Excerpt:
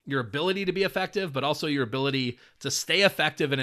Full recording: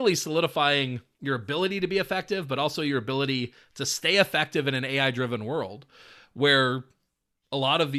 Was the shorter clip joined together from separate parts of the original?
no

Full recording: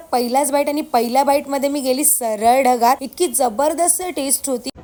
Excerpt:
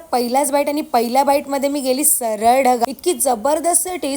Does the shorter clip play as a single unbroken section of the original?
no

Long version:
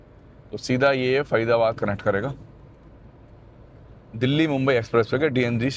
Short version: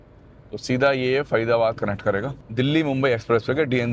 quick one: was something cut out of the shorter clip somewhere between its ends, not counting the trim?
yes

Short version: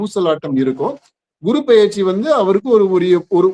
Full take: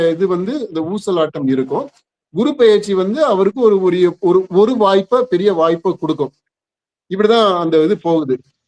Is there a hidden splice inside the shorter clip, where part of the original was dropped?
no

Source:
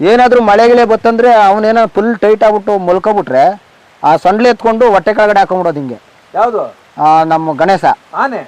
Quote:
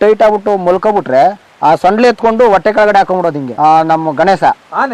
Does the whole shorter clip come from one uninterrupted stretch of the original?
no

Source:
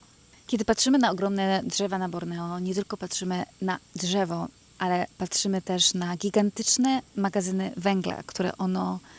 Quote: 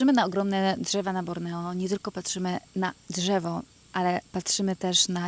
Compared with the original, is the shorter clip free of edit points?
yes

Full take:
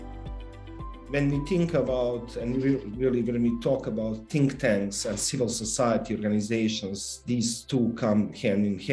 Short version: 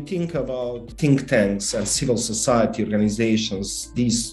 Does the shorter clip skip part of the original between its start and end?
yes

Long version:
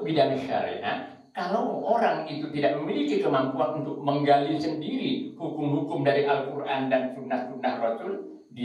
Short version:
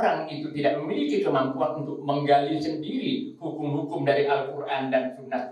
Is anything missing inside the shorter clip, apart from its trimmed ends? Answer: no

